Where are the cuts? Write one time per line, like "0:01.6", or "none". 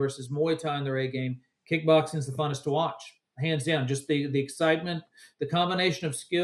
none